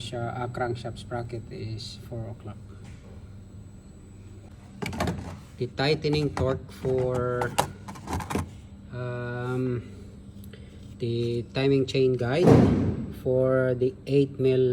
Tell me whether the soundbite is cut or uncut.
cut